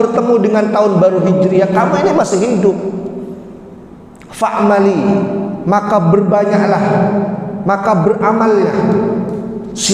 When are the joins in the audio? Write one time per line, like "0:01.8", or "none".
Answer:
none